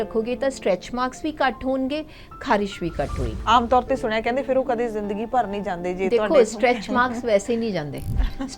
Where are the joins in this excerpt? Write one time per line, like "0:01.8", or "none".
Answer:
0:03.3